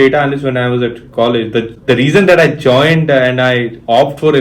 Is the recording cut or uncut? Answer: uncut